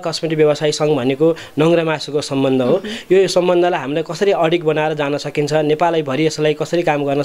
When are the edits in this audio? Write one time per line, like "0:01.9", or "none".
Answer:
none